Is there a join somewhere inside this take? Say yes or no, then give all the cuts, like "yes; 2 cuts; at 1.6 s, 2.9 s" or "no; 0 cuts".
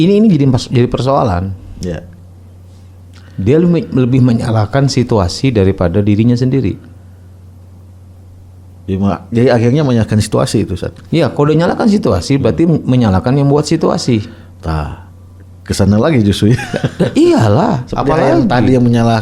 no; 0 cuts